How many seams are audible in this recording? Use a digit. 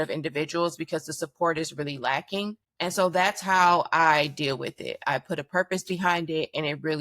1